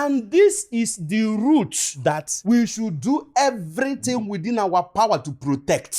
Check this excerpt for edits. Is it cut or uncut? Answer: uncut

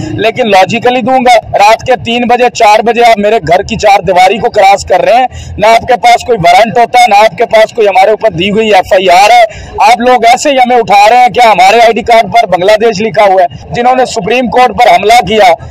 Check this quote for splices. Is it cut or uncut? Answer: cut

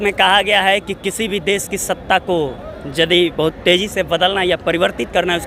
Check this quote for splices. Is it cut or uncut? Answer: uncut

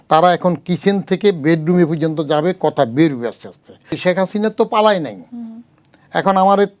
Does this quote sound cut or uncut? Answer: cut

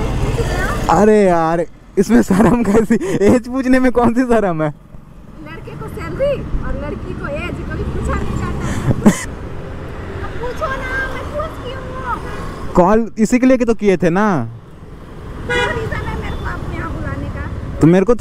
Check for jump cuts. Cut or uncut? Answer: cut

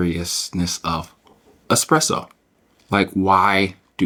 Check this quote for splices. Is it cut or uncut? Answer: uncut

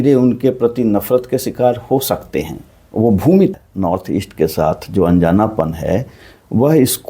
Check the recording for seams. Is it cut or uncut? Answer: cut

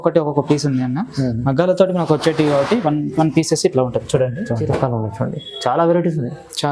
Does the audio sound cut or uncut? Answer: cut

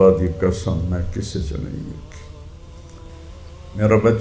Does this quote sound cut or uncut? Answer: cut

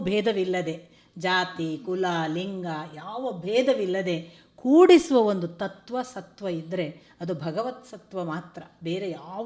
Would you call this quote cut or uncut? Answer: uncut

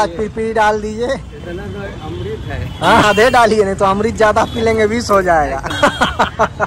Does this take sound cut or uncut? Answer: cut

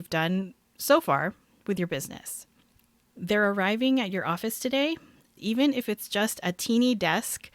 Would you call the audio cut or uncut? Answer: cut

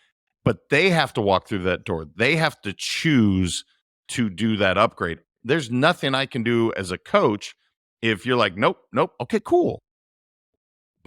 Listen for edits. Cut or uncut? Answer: uncut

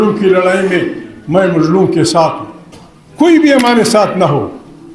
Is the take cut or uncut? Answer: uncut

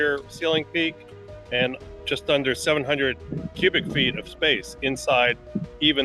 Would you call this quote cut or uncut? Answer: uncut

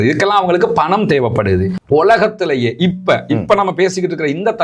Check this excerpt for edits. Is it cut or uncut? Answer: cut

